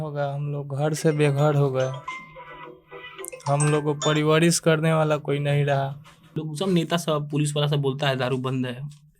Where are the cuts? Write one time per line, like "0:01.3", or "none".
0:06.4